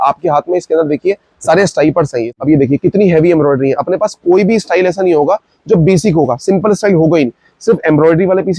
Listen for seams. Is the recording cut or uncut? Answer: cut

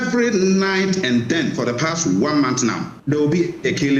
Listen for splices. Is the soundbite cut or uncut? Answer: cut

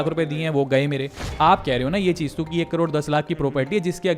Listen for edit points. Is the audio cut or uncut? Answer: cut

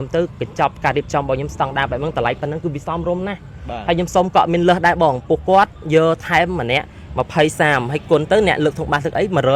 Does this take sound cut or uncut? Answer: uncut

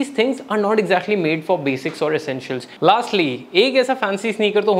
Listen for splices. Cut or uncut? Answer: cut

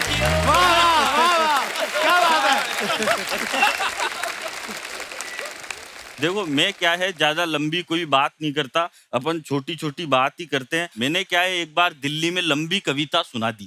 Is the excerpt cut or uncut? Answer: uncut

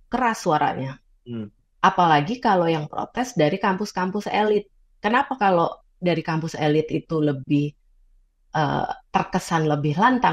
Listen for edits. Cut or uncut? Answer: uncut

